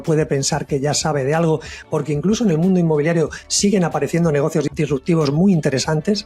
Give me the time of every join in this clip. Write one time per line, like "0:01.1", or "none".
0:04.7